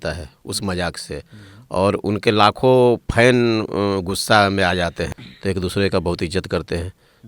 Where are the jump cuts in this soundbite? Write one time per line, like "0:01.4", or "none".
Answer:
0:05.2